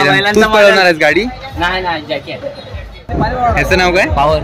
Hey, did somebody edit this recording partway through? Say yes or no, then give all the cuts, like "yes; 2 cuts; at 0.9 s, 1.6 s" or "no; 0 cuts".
yes; 1 cut; at 2.9 s